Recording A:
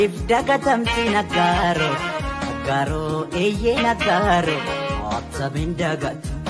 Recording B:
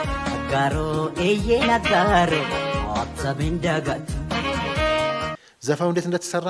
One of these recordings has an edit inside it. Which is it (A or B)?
B